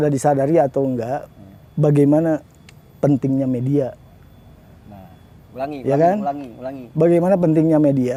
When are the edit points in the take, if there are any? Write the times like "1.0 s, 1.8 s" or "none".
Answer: none